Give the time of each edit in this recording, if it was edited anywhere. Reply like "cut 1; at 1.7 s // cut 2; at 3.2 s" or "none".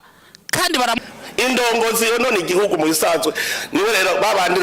cut 1; at 1.0 s